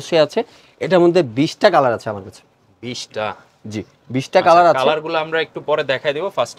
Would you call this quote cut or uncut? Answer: uncut